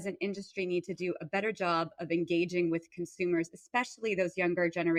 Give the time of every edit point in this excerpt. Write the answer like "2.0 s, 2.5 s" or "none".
none